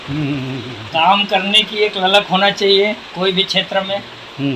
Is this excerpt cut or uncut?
uncut